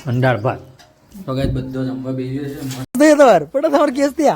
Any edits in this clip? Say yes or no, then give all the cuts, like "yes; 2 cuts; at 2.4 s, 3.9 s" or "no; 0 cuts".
yes; 1 cut; at 3.0 s